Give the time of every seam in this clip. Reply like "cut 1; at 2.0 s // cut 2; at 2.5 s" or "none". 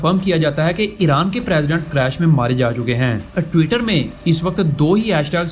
cut 1; at 3.3 s